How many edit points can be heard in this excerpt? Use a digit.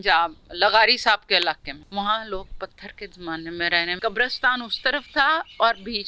2